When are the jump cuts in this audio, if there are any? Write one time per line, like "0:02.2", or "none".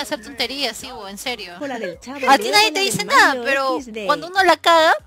0:01.5